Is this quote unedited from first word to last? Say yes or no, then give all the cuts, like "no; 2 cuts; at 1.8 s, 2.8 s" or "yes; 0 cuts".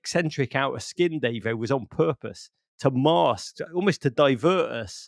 yes; 0 cuts